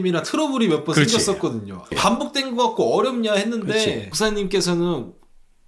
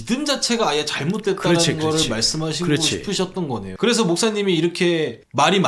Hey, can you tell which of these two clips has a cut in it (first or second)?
second